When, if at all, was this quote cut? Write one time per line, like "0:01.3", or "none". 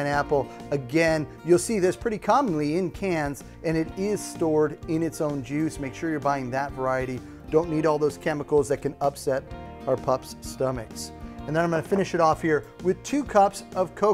none